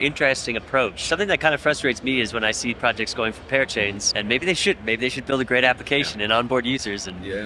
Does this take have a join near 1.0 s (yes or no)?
yes